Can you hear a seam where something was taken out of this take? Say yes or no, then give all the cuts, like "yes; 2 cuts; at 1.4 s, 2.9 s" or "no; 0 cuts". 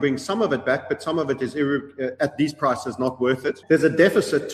yes; 1 cut; at 3.6 s